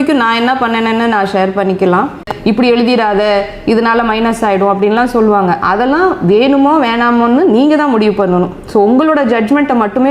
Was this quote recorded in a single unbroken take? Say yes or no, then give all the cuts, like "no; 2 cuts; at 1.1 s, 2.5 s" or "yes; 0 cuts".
no; 1 cut; at 2.3 s